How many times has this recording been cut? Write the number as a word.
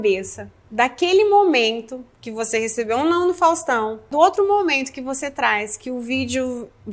one